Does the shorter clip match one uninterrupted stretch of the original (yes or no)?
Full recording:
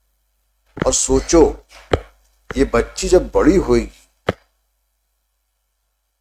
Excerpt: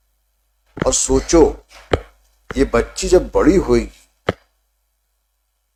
yes